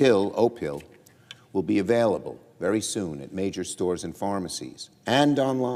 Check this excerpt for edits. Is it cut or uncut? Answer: cut